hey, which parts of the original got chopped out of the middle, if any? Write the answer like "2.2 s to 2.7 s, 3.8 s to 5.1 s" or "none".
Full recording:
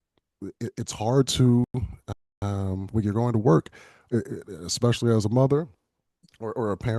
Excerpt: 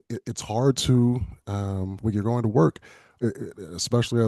1.8 s to 2.2 s